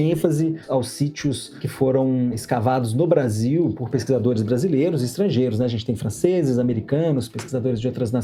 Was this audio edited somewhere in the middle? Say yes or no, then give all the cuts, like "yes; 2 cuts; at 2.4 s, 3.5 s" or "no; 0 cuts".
no; 0 cuts